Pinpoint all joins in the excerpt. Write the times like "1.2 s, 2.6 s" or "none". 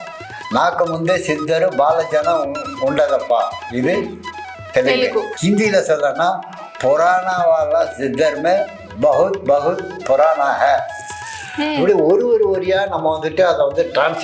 5.3 s